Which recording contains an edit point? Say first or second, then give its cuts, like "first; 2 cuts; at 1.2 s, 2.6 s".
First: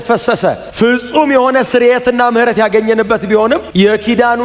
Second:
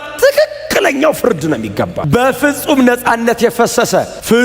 second; 1 cut; at 2.0 s